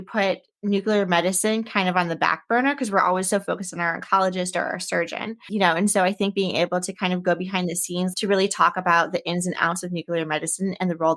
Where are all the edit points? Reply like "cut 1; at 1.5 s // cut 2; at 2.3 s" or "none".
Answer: cut 1; at 5.4 s // cut 2; at 8.1 s